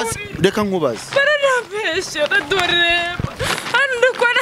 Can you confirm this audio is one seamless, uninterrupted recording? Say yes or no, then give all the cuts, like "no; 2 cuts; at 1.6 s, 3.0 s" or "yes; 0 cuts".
yes; 0 cuts